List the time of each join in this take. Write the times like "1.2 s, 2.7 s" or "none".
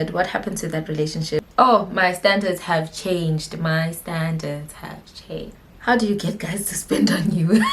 1.4 s, 5.7 s